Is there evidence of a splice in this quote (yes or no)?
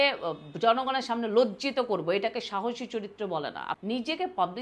yes